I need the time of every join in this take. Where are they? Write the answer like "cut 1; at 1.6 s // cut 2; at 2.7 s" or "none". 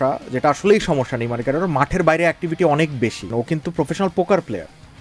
cut 1; at 3.3 s